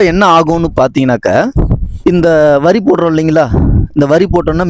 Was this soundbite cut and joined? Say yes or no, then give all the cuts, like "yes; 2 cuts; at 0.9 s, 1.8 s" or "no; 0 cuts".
yes; 1 cut; at 1.8 s